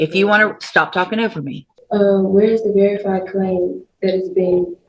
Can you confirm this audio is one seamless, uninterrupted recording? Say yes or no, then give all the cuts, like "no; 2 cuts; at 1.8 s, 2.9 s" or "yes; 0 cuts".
no; 1 cut; at 1.7 s